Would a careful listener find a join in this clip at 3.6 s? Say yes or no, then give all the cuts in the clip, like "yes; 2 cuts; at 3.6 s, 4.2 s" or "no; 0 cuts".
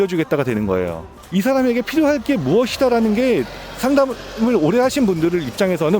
no; 1 cut; at 1.1 s